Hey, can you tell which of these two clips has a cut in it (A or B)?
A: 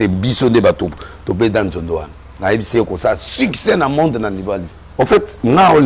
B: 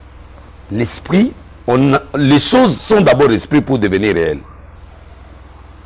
A